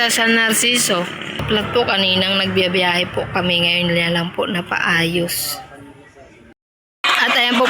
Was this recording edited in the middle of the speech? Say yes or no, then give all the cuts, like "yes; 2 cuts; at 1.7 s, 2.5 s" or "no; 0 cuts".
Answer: yes; 2 cuts; at 1.4 s, 6.7 s